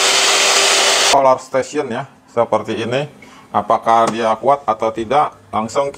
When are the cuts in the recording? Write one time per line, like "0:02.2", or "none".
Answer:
0:01.1